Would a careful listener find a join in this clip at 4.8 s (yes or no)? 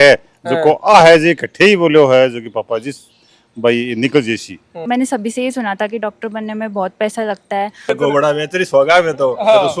yes